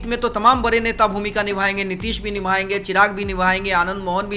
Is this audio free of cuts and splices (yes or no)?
yes